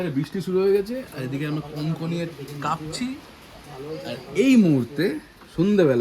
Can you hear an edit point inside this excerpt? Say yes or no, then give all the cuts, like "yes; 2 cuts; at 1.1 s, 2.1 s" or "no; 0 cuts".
no; 0 cuts